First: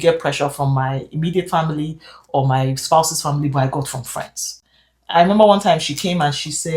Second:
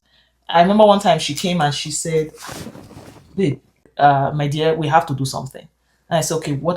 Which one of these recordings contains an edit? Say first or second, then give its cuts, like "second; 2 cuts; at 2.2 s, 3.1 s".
second; 1 cut; at 3.9 s